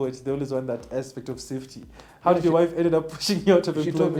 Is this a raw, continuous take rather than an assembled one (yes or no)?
yes